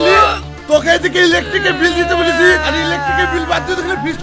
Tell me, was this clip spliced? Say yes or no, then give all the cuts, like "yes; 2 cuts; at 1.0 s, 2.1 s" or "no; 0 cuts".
no; 0 cuts